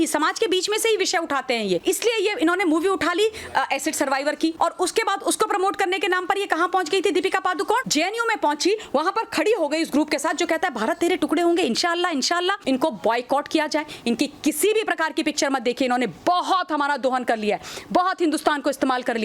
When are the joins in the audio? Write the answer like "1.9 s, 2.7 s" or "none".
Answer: 1.8 s, 4.5 s, 7.9 s, 12.6 s